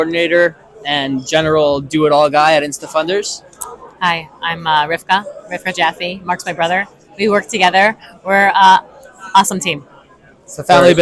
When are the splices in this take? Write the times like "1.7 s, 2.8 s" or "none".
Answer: none